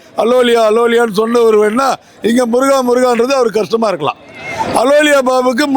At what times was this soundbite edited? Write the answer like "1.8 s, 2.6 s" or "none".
none